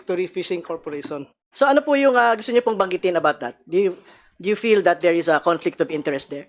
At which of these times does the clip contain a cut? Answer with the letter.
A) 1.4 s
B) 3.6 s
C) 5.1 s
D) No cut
A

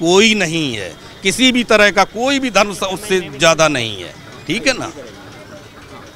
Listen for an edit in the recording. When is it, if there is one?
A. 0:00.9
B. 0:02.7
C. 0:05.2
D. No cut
D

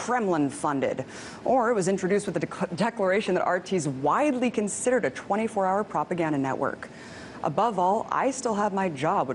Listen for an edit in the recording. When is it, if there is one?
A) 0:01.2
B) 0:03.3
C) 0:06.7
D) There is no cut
D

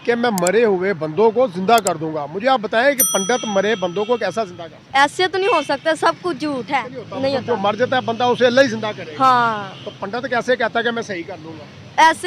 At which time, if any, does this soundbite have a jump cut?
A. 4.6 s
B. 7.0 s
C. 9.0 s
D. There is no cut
B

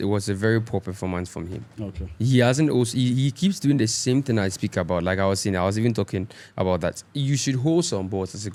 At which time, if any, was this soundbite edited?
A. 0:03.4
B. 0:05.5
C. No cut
C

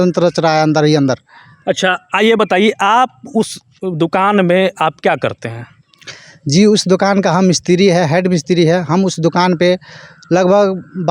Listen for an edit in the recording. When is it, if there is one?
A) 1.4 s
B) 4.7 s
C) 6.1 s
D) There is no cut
D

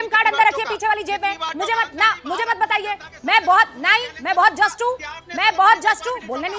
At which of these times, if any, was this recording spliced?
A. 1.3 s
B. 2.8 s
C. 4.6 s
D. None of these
A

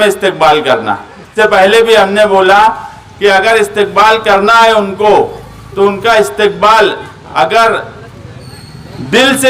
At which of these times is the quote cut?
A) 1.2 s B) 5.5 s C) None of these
A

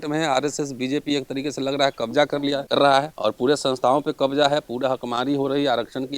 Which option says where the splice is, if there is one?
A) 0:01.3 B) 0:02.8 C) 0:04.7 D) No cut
B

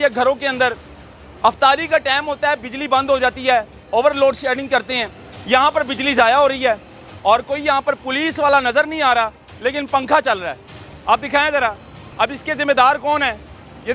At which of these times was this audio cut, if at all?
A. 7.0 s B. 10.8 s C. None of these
A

